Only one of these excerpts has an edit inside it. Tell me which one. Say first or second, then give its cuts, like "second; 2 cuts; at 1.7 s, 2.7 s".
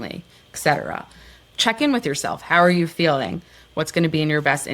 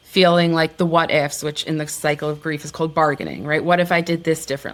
first; 1 cut; at 1.5 s